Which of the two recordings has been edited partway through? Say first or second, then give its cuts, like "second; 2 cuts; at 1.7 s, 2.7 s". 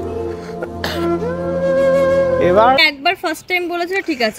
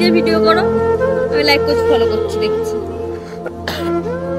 first; 1 cut; at 2.8 s